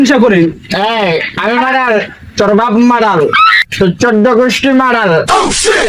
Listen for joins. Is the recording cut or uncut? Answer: uncut